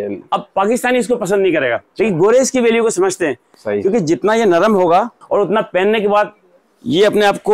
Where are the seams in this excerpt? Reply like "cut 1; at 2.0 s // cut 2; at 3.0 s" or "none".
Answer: cut 1; at 1.9 s // cut 2; at 5.2 s